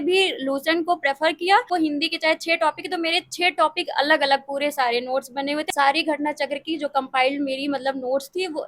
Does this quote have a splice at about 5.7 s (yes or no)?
yes